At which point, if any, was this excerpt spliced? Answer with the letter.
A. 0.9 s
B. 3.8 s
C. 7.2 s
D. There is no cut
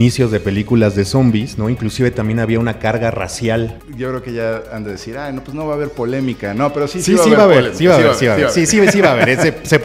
B